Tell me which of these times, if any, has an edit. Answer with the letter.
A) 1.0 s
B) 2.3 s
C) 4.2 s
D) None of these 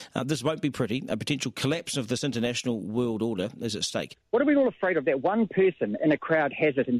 C